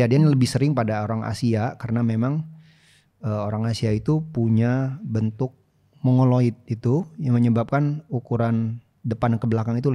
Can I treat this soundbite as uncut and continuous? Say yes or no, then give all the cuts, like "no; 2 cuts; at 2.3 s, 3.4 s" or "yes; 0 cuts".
no; 1 cut; at 8.9 s